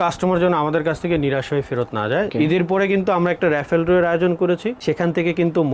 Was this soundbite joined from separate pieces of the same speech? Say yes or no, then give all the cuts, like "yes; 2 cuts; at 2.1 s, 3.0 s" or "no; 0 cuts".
yes; 1 cut; at 2.3 s